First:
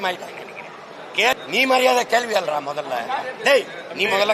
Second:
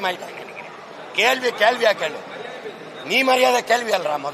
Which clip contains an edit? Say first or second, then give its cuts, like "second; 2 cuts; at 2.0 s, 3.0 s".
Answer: first; 1 cut; at 1.4 s